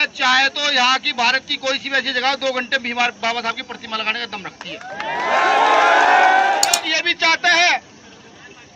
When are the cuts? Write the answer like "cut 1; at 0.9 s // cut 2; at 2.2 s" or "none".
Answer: cut 1; at 6.7 s